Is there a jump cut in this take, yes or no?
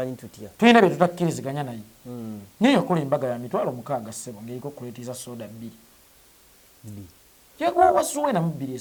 no